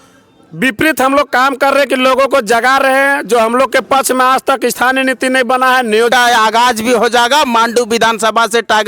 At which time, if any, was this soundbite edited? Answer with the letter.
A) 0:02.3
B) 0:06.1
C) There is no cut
B